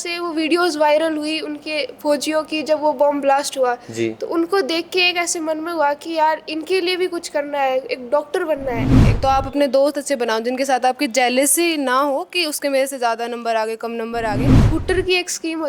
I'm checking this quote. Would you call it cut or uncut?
cut